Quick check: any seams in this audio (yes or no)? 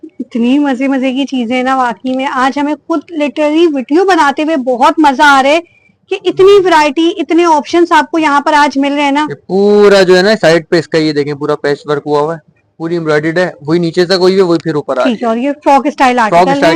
no